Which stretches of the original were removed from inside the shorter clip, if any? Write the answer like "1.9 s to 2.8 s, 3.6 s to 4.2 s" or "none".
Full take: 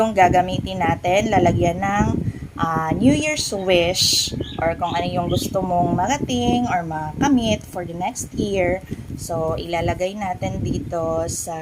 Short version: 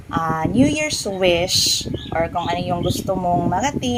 none